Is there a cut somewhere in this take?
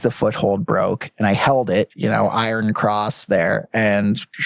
no; 0 cuts

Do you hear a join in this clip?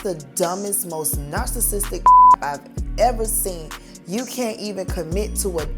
yes; 1 cut; at 3.9 s

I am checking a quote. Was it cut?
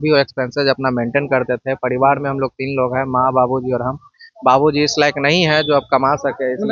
no; 0 cuts

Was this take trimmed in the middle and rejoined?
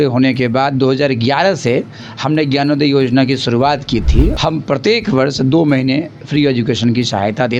yes; 1 cut; at 4.3 s

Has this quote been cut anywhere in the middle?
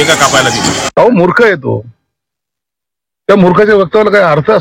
yes; 1 cut; at 1.0 s

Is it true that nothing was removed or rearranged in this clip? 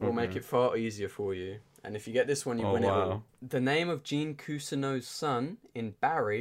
no; 1 cut; at 3.3 s

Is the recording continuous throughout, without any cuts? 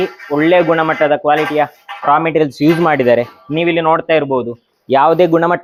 yes; 0 cuts

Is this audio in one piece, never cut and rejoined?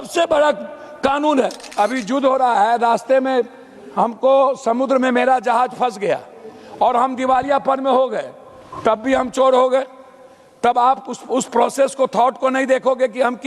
no; 1 cut; at 1.6 s

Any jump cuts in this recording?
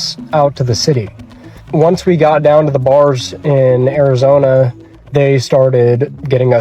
yes; 1 cut; at 1.5 s

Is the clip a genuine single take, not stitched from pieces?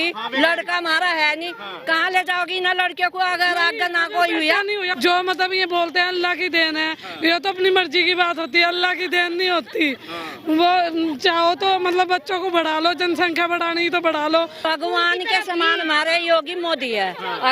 no; 2 cuts; at 4.9 s, 14.6 s

